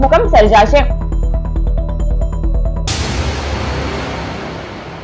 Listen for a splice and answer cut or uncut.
cut